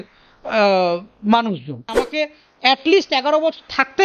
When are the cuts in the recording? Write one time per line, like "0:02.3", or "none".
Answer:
0:02.0

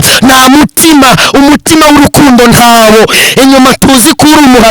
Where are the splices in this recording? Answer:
0:03.2

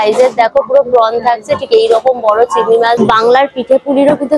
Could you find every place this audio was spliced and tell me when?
0:03.0

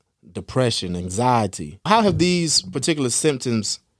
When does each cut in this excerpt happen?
0:01.8

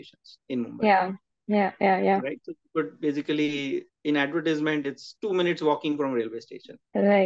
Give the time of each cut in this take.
none

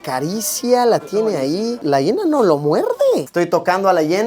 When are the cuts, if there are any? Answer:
0:01.8
0:03.3

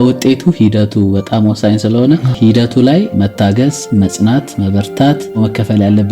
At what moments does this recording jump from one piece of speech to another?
0:02.3
0:03.7

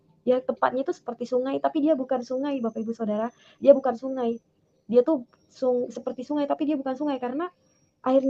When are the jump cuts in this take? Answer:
none

